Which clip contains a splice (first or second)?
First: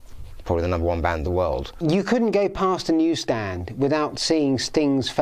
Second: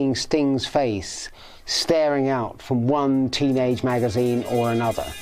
first